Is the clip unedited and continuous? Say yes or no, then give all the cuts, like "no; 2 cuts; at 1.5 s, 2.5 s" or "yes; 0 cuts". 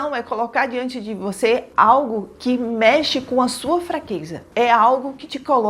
no; 1 cut; at 4.5 s